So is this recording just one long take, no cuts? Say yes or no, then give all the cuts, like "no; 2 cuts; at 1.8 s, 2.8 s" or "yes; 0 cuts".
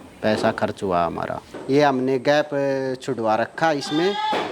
no; 1 cut; at 1.5 s